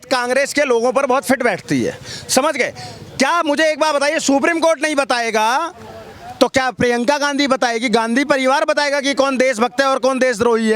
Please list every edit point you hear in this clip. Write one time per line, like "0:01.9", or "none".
none